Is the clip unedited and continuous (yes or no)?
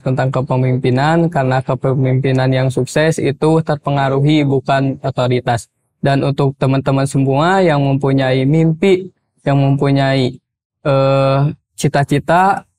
yes